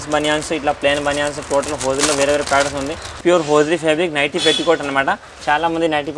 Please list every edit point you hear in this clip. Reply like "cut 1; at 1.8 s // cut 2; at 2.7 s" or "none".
cut 1; at 3.1 s

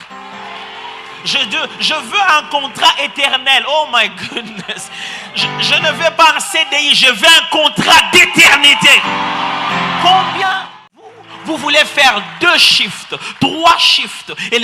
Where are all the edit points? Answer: cut 1; at 11.2 s

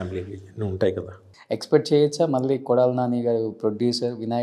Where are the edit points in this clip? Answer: cut 1; at 1.3 s

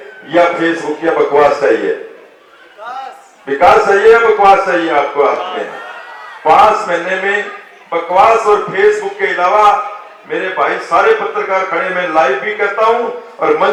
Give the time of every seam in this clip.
none

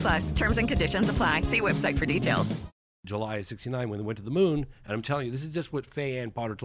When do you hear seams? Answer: cut 1; at 3.0 s

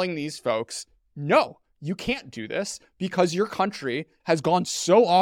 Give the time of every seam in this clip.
cut 1; at 4.1 s

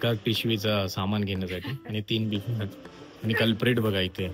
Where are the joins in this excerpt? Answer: none

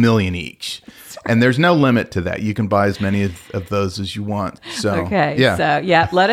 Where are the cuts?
cut 1; at 4.6 s

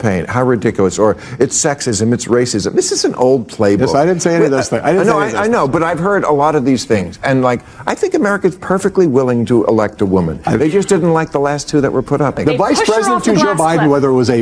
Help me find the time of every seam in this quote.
cut 1; at 12.4 s

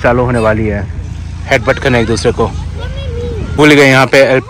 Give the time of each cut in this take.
cut 1; at 3.5 s

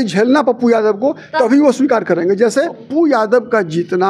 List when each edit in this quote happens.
cut 1; at 2.8 s

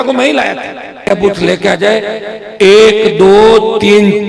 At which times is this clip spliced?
cut 1; at 1.1 s

